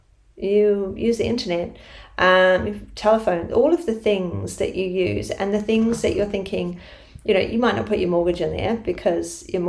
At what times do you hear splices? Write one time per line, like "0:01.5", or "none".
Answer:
none